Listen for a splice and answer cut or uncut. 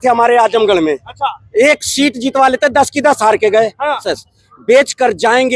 cut